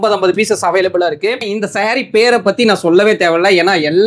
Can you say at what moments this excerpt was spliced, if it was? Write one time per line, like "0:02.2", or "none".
0:01.5